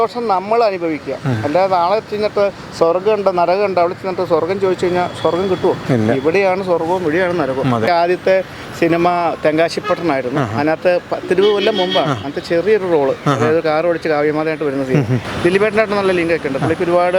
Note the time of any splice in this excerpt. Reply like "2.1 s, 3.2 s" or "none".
7.9 s, 15.2 s